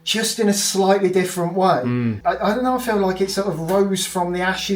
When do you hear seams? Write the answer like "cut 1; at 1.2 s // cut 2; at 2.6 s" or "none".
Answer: cut 1; at 2.2 s